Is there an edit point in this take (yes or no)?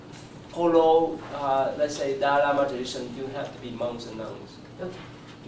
yes